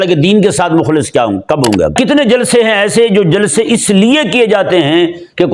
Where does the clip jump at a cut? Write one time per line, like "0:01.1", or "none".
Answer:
0:01.9